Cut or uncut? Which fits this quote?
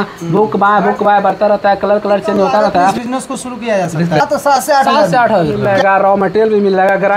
cut